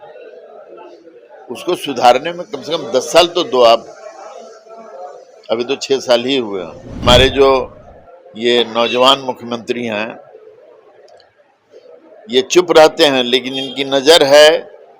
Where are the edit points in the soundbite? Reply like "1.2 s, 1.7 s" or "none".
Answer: 6.9 s